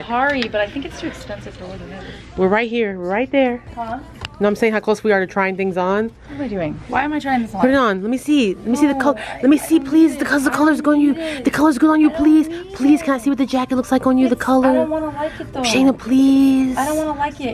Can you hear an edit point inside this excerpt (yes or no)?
no